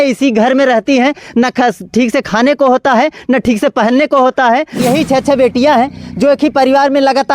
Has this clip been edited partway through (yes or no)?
yes